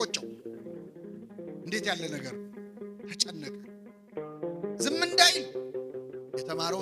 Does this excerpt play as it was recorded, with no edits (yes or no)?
yes